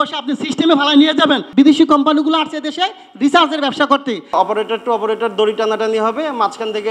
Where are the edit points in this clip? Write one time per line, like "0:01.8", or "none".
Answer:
0:01.5
0:04.3